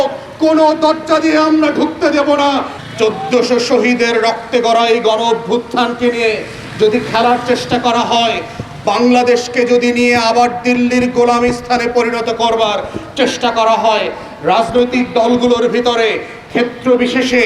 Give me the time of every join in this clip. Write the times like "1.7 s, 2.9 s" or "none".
2.7 s